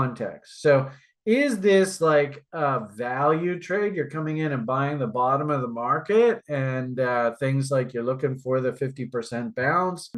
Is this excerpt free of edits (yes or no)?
yes